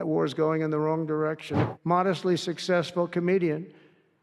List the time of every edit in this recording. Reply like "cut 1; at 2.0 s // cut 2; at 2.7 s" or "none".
cut 1; at 1.5 s

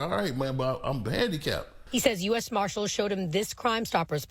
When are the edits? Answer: none

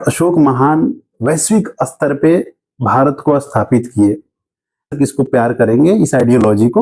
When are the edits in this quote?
cut 1; at 4.9 s

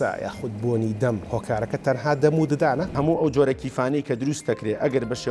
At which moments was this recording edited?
cut 1; at 2.9 s

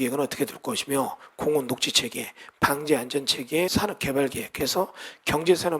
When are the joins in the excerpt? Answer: cut 1; at 3.7 s

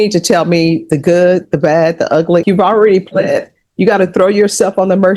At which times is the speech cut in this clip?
cut 1; at 2.4 s

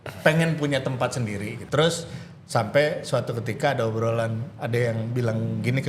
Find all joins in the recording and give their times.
cut 1; at 1.6 s

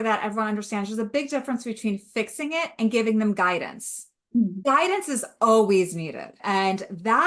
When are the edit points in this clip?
cut 1; at 4.6 s // cut 2; at 6.3 s

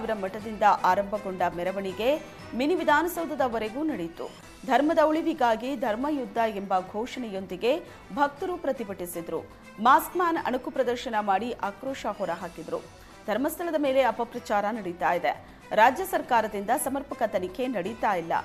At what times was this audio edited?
none

